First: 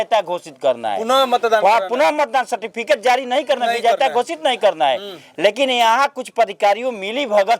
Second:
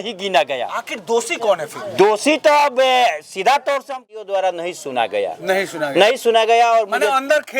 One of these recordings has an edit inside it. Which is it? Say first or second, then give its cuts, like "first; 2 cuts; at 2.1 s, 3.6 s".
second; 1 cut; at 4.1 s